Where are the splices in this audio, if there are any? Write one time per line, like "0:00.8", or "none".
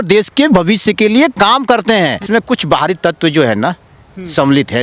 0:02.2

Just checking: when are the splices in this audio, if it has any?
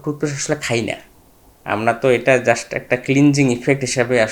none

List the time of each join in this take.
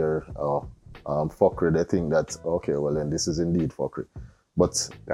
none

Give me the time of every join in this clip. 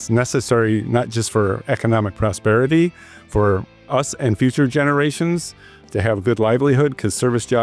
none

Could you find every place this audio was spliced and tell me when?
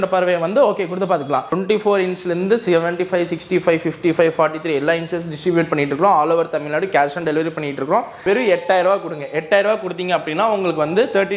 0:01.5
0:08.2

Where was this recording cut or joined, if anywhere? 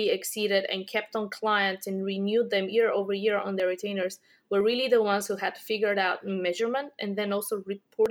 none

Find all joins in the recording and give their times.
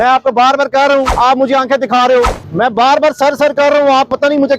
0:01.1
0:02.4

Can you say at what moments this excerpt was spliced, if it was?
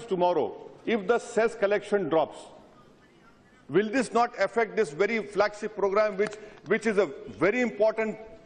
0:01.6

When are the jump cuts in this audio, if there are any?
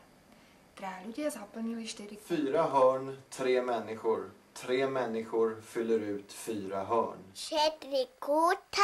0:02.1
0:07.3

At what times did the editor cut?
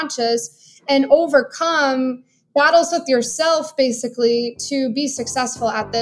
none

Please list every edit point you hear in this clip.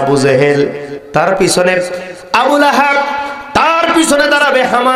none

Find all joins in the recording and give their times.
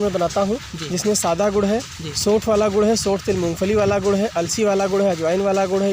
none

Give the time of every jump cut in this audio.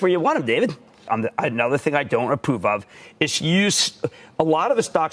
0:01.0

